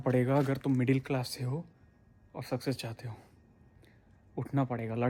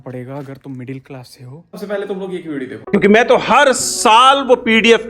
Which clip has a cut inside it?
second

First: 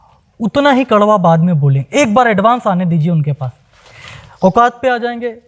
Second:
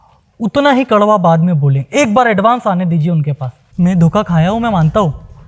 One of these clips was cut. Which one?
second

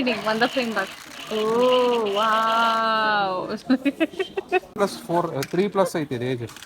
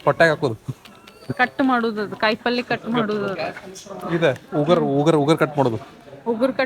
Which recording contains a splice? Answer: first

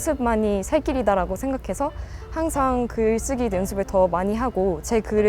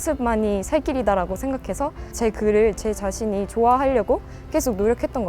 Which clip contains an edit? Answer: second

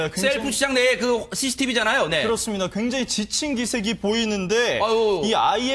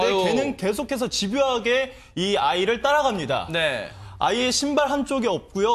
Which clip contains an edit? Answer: first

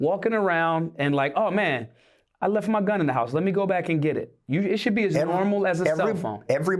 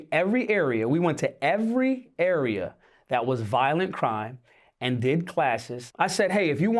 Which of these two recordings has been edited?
second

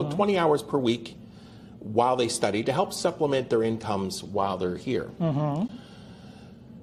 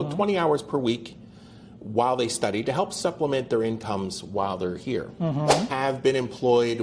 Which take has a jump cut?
second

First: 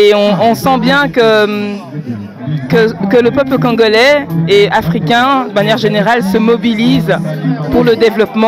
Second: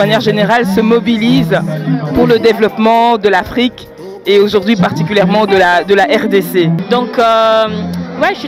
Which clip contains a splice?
second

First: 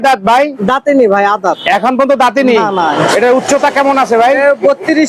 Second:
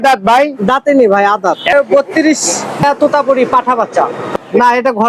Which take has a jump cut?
second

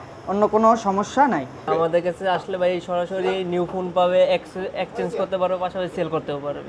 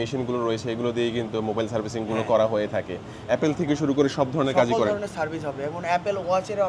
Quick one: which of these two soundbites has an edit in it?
first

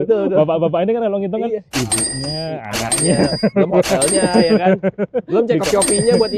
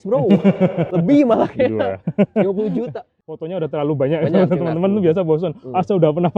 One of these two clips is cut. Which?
second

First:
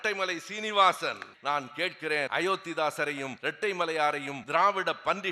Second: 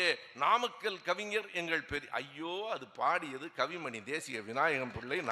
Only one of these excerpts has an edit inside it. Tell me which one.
first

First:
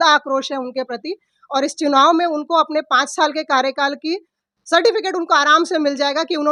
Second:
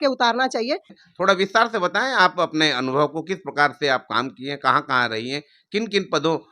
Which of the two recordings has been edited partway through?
second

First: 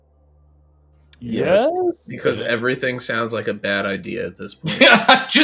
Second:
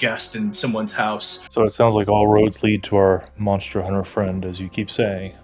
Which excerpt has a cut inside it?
second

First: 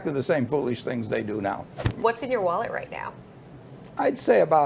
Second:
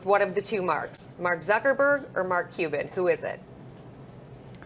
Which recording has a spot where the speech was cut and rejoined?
first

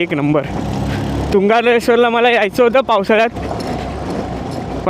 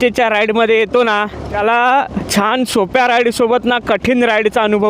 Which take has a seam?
second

